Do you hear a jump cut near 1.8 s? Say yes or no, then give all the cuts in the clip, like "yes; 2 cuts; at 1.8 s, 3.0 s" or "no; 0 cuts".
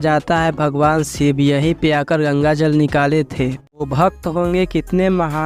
no; 1 cut; at 3.8 s